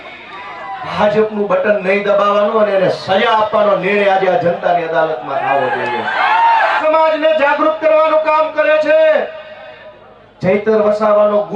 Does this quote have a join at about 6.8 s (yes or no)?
yes